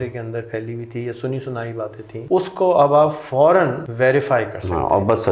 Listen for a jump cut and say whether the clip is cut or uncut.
cut